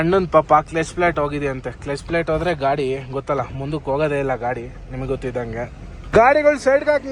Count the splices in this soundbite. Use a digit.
1